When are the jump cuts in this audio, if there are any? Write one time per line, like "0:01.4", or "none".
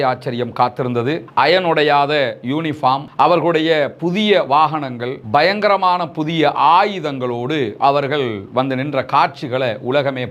none